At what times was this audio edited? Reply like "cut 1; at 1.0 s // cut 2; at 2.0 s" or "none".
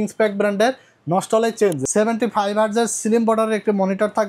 cut 1; at 1.8 s